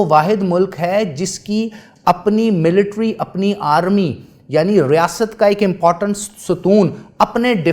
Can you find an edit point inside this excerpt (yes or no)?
no